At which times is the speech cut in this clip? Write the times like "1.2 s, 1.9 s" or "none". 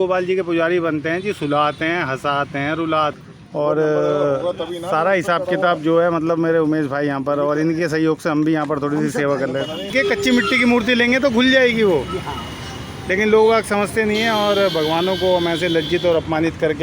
3.2 s, 9.9 s